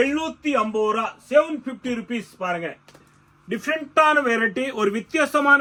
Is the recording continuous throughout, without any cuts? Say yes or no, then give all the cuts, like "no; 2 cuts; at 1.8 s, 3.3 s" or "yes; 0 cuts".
yes; 0 cuts